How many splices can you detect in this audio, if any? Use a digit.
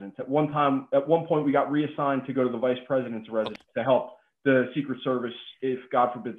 1